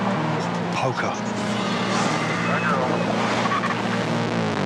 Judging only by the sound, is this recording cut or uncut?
cut